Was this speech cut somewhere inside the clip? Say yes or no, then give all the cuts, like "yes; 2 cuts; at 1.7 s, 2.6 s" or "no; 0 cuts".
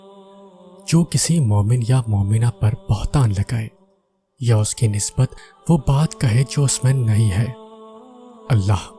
yes; 1 cut; at 0.9 s